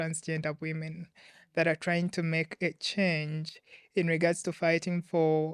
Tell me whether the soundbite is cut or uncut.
uncut